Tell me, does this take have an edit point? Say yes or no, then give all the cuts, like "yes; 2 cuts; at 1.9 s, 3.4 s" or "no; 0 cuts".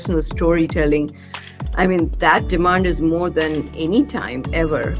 no; 0 cuts